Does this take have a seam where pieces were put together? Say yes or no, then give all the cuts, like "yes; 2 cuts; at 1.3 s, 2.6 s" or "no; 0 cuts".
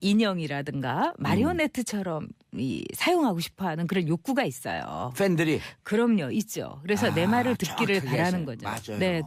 yes; 1 cut; at 1.2 s